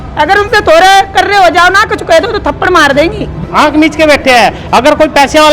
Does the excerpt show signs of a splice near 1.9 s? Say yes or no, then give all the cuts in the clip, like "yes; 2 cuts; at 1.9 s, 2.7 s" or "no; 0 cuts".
no; 1 cut; at 3.4 s